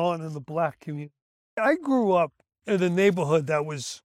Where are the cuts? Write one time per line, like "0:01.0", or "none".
0:01.4